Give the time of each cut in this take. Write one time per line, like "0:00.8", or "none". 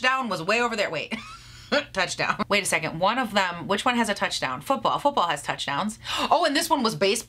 0:02.4